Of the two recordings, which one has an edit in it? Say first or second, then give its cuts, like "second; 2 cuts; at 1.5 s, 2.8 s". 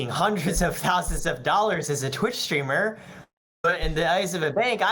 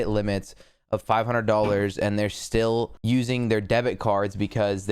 second; 1 cut; at 3.0 s